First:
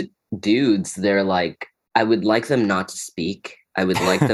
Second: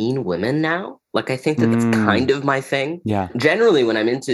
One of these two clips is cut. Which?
second; 2 cuts; at 2.1 s, 3.3 s

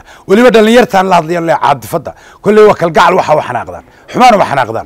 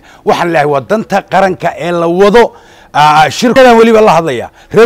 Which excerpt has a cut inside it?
second; 1 cut; at 3.5 s

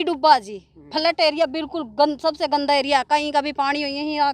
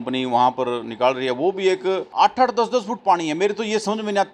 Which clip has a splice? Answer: second; 1 cut; at 2.1 s

